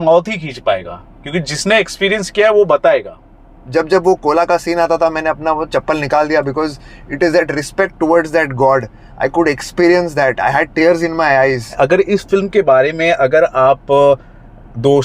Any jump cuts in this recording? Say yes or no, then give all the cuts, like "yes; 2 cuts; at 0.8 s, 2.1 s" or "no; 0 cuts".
yes; 2 cuts; at 3.7 s, 11.7 s